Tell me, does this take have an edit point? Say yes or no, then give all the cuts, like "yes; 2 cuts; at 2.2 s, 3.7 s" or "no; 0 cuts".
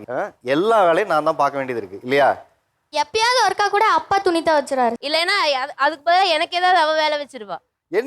yes; 1 cut; at 5.0 s